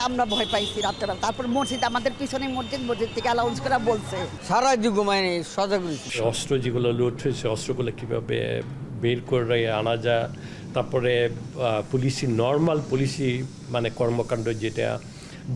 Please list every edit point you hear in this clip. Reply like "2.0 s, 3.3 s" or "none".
4.3 s, 6.1 s